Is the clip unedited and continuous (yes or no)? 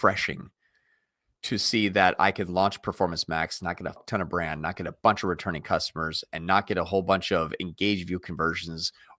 no